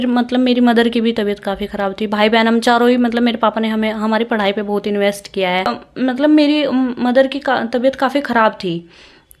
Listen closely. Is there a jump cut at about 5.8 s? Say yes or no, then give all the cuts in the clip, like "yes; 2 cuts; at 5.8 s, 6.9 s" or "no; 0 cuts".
yes; 1 cut; at 5.8 s